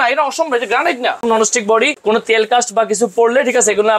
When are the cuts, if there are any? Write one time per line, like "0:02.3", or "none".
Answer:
0:01.7